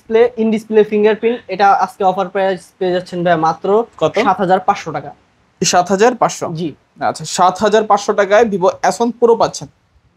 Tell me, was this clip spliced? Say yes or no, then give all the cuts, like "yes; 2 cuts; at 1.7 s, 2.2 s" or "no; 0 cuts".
no; 0 cuts